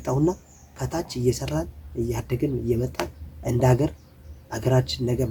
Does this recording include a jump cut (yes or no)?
no